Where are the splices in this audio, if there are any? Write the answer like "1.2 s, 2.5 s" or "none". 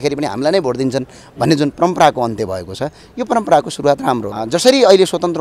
4.3 s